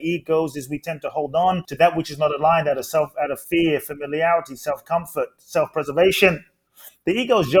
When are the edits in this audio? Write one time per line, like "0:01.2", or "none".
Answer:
0:01.7
0:03.4